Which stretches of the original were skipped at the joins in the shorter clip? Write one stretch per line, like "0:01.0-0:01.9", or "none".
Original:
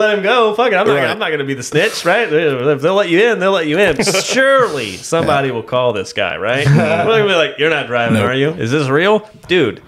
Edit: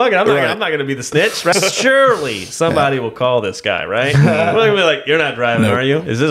0:02.1-0:04.1